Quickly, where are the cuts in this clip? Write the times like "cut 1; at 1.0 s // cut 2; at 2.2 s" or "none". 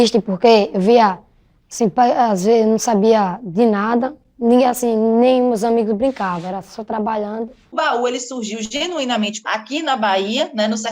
cut 1; at 7.7 s // cut 2; at 9.4 s